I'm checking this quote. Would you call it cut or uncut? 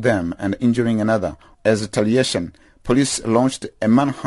cut